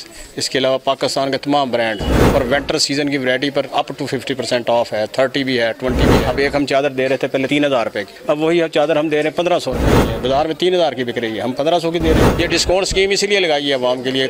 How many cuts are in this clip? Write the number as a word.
five